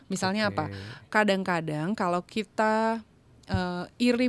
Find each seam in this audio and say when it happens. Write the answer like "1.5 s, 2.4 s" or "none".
none